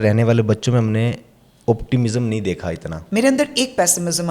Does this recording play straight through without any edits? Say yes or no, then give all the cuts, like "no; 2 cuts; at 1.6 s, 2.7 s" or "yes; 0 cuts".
no; 1 cut; at 2.9 s